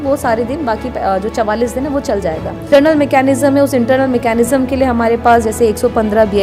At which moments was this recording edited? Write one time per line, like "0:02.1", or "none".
0:02.7